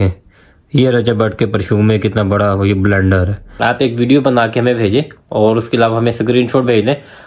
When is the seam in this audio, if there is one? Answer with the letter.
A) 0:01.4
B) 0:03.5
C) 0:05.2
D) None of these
B